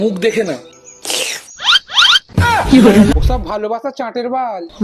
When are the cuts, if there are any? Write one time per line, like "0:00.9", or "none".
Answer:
0:03.1